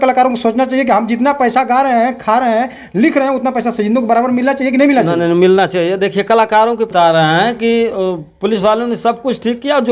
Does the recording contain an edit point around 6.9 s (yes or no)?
yes